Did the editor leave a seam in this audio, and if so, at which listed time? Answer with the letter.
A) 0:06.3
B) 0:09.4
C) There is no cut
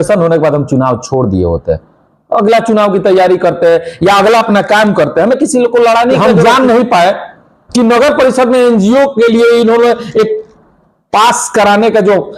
A